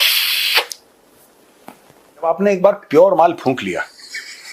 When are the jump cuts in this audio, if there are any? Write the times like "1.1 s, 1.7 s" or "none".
2.2 s